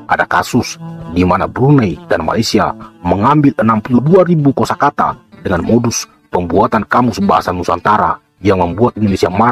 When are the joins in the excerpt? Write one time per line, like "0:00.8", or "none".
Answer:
none